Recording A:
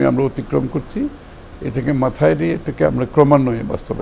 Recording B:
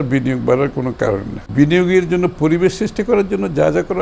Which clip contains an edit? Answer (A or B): B